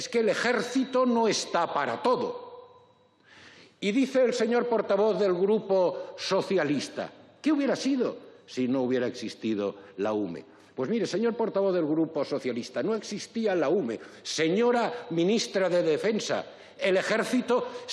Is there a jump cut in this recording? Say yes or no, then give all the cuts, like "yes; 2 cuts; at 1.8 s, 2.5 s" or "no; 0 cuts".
no; 0 cuts